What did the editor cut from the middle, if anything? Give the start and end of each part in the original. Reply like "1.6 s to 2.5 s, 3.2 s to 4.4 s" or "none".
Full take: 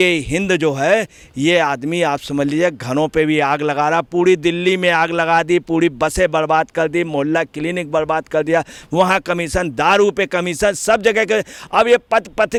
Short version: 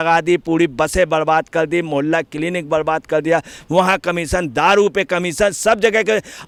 none